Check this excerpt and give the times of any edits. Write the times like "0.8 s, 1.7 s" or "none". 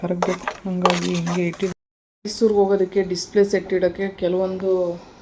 1.7 s